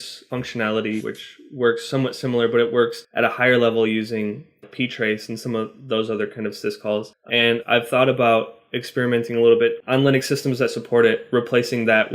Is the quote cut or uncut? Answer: cut